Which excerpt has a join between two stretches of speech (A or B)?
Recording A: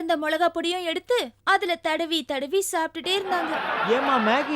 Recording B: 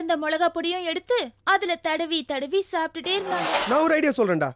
B